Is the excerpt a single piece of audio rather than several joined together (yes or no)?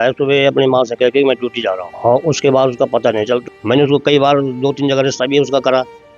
no